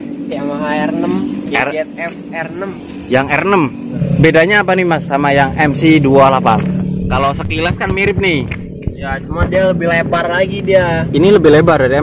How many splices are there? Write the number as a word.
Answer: one